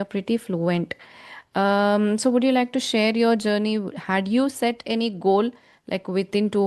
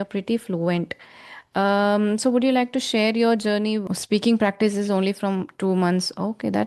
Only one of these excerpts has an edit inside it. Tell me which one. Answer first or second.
second